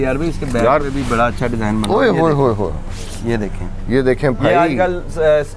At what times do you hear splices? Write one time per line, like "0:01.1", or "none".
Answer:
none